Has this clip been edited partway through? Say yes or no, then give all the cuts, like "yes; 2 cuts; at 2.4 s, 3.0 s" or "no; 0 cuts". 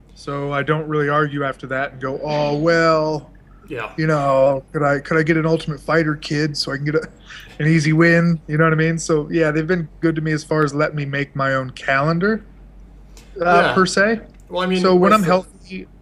yes; 1 cut; at 7.9 s